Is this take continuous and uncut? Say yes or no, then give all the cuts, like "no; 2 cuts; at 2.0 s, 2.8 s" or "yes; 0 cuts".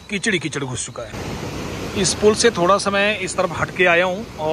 no; 1 cut; at 1.1 s